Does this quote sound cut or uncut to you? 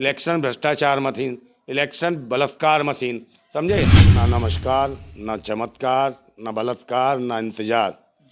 cut